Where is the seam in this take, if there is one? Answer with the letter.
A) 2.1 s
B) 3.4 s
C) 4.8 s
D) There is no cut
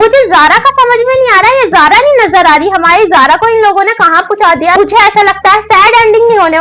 C